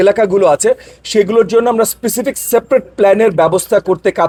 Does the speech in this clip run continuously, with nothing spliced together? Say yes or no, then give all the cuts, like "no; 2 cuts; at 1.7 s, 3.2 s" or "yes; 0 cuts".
yes; 0 cuts